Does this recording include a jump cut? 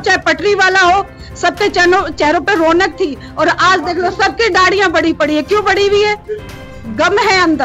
no; 0 cuts

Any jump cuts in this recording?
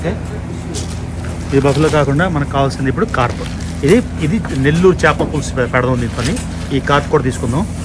no; 0 cuts

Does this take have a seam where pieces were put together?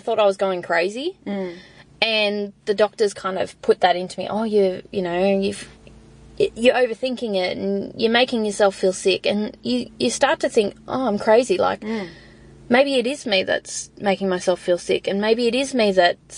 no; 0 cuts

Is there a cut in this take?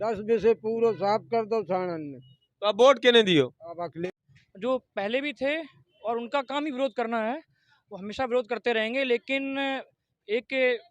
yes; 1 cut; at 4.0 s

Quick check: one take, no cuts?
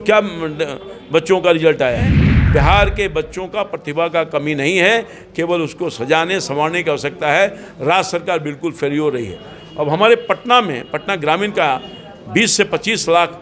no; 1 cut; at 2.2 s

